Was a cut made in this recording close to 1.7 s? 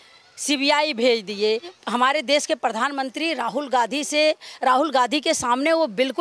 yes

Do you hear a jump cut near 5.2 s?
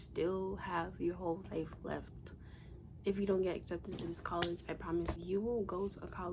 yes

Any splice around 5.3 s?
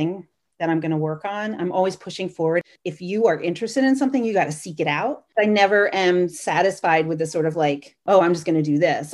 yes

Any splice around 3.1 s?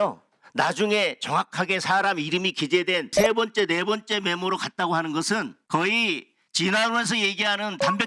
yes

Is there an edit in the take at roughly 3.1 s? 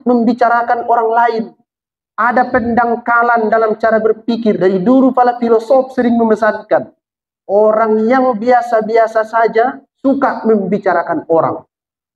no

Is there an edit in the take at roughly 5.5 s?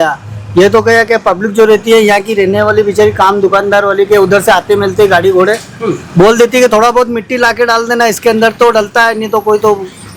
no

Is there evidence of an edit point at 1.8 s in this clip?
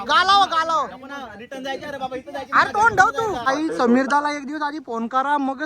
no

